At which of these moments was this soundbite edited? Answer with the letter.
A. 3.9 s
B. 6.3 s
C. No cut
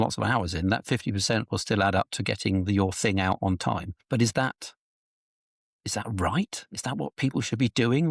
A